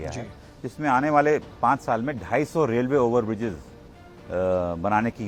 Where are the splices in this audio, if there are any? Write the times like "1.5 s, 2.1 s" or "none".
none